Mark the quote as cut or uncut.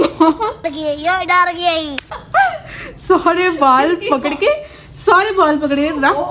uncut